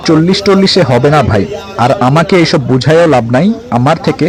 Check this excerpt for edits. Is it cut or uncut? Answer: uncut